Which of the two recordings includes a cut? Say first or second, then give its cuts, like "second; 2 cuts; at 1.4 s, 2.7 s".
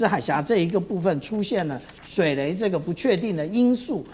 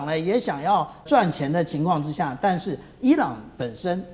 second; 1 cut; at 1.0 s